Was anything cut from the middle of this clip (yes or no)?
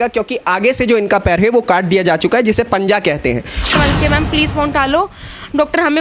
yes